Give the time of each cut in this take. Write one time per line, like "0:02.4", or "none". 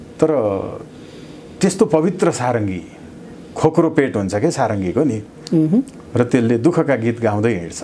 none